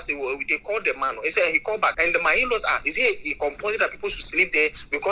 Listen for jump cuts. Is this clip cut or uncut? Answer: cut